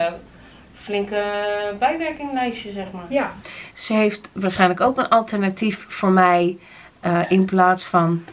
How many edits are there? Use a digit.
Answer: 1